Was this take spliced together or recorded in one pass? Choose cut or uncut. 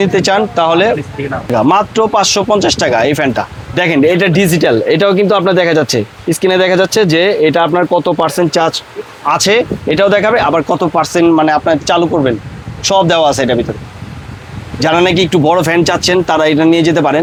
uncut